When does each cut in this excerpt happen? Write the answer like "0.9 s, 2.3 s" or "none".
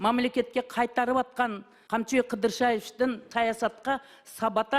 1.7 s, 3.2 s